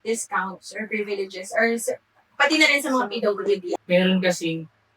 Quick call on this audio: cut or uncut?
cut